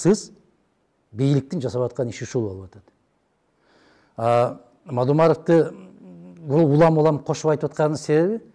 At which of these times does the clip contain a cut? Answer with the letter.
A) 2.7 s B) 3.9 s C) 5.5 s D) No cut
D